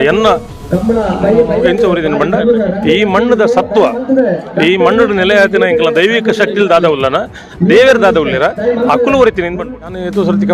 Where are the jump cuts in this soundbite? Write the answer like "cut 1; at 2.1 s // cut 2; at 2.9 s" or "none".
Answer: cut 1; at 9.6 s